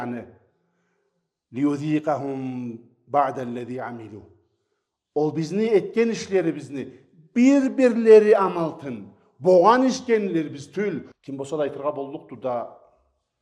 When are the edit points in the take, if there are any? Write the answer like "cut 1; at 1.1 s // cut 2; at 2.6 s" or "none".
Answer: cut 1; at 11.1 s